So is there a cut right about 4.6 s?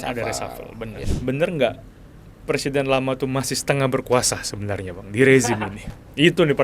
no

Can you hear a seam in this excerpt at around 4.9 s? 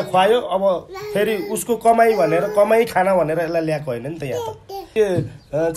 yes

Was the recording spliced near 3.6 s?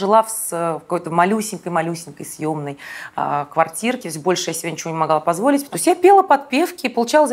no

